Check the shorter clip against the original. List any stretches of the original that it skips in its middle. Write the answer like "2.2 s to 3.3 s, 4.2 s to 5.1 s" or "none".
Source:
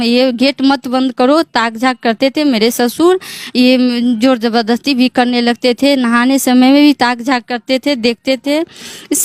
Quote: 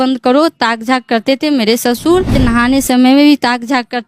3.3 s to 5.9 s